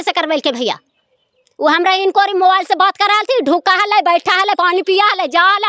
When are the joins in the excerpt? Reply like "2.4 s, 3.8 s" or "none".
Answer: none